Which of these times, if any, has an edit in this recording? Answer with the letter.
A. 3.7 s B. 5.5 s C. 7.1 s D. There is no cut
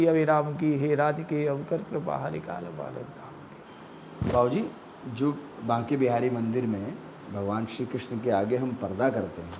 A